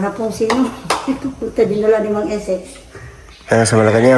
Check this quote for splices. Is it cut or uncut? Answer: uncut